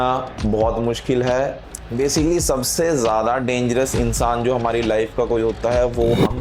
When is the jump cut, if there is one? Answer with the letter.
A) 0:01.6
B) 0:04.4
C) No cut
A